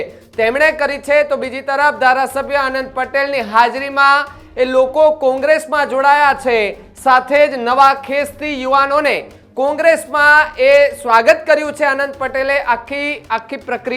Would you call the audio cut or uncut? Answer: uncut